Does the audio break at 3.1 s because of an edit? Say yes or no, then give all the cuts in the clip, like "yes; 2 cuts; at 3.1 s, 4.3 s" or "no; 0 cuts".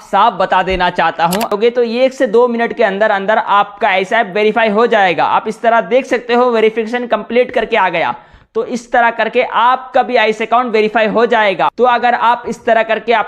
no; 1 cut; at 1.5 s